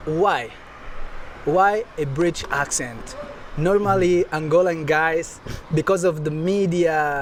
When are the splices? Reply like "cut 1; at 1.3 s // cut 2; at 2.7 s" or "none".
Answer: none